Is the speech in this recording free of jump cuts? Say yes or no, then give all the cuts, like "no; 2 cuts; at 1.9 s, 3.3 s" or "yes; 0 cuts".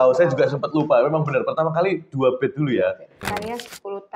no; 1 cut; at 3.2 s